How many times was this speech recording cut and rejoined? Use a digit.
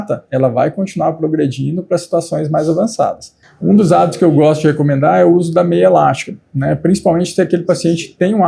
1